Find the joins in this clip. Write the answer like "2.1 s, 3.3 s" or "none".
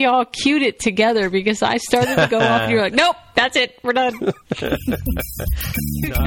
none